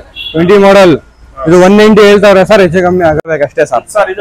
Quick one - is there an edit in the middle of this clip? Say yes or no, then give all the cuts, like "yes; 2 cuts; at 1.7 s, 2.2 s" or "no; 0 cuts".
yes; 1 cut; at 3.3 s